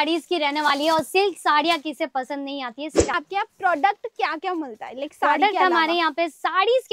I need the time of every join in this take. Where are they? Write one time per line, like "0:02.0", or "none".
0:03.1

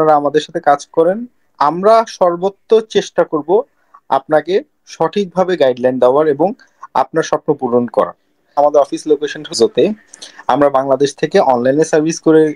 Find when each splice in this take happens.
0:08.5

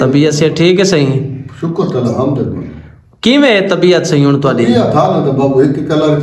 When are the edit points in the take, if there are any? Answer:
none

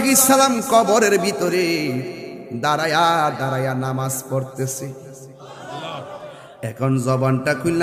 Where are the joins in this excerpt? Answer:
none

